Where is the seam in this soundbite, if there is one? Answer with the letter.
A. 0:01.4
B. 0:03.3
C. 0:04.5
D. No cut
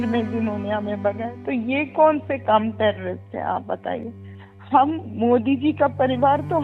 C